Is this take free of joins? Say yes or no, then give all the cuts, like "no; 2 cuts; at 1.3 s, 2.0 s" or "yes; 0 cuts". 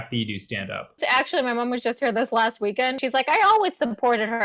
no; 2 cuts; at 1.0 s, 3.0 s